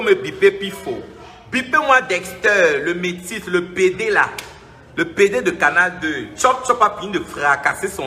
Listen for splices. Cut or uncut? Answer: uncut